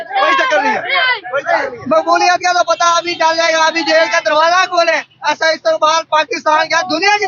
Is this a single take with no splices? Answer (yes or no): yes